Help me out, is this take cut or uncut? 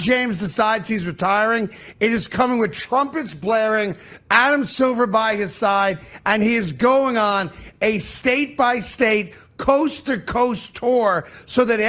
uncut